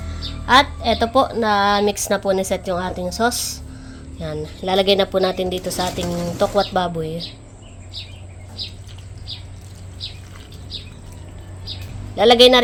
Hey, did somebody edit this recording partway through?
no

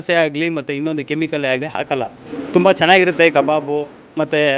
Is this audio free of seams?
yes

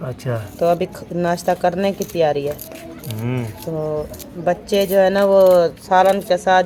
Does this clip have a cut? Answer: no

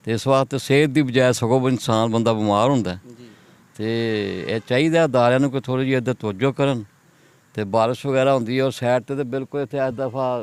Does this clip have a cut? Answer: no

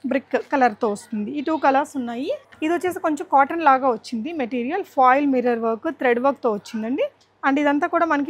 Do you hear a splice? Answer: yes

